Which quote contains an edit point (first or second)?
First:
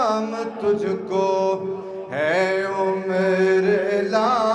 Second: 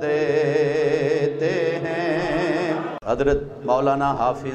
second